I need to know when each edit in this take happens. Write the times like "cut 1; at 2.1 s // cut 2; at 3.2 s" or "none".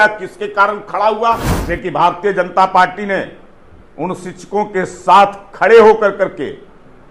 cut 1; at 1.5 s